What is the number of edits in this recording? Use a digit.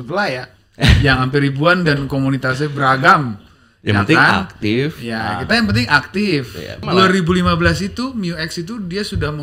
1